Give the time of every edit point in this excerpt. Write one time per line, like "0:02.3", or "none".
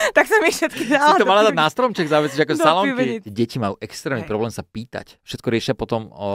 0:03.2
0:05.2